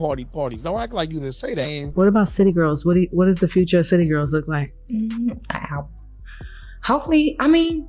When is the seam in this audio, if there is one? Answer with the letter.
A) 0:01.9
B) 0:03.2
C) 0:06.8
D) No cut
A